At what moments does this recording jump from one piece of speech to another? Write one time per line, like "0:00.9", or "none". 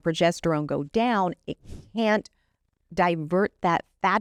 none